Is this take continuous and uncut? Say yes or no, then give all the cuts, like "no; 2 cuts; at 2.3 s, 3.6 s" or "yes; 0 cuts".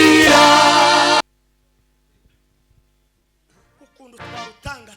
no; 1 cut; at 1.2 s